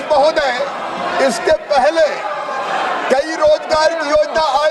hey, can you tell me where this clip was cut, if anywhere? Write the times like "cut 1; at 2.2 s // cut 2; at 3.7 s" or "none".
none